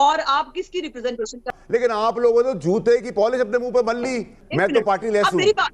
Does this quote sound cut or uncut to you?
cut